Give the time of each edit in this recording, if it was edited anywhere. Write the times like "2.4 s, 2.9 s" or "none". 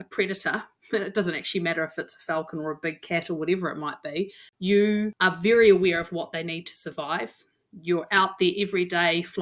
4.4 s, 5.1 s